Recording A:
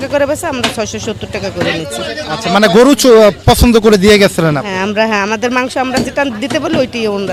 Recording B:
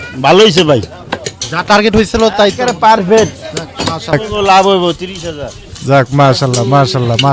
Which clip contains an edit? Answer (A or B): B